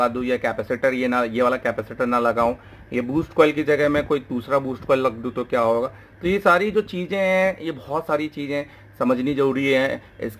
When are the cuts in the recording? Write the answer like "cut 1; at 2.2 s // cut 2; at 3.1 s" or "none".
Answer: none